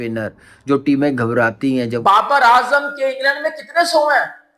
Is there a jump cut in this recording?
yes; 1 cut; at 2.0 s

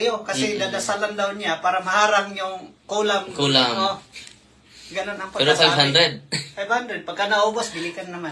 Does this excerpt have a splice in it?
no; 0 cuts

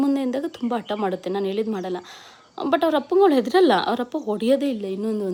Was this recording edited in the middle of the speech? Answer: no; 0 cuts

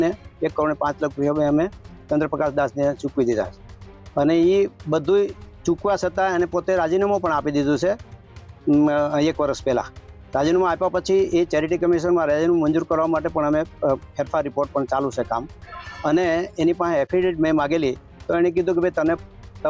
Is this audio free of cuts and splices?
yes; 0 cuts

